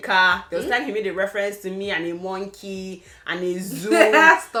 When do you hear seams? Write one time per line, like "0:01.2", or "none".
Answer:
none

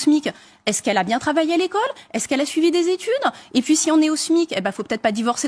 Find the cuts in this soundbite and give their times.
0:03.4

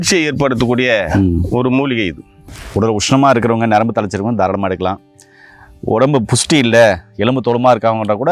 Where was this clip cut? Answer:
0:02.6

